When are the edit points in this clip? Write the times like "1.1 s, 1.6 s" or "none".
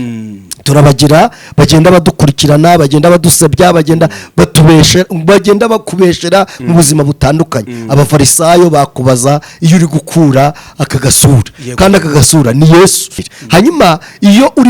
13.3 s